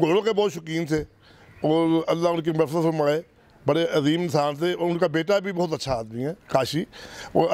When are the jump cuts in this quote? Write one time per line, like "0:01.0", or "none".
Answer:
none